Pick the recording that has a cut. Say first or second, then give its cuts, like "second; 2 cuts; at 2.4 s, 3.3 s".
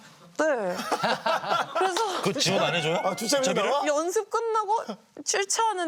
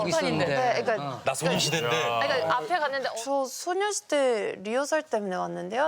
second; 1 cut; at 3.1 s